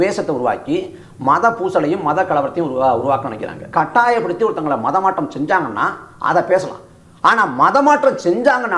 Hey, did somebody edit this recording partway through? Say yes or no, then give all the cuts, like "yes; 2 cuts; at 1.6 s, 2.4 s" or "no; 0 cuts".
yes; 1 cut; at 3.7 s